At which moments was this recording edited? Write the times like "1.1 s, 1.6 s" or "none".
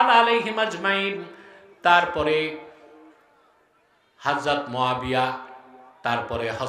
none